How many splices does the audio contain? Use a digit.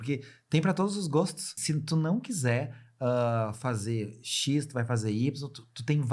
1